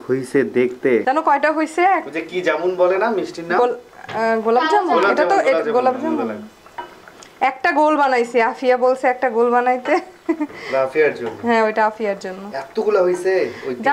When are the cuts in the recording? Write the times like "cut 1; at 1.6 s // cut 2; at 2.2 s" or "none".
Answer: cut 1; at 1.0 s